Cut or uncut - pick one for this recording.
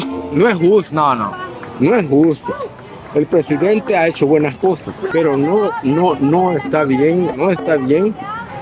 cut